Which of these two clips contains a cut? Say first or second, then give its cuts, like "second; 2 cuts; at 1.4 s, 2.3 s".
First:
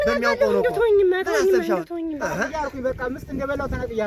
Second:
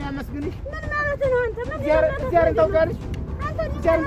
first; 1 cut; at 2.4 s